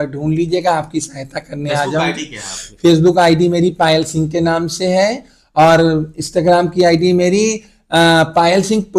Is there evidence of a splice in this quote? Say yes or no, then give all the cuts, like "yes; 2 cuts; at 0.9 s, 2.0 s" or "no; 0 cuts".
no; 0 cuts